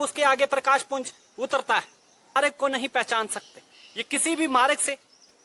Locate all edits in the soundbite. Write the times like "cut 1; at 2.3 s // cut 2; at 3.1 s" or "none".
cut 1; at 2.4 s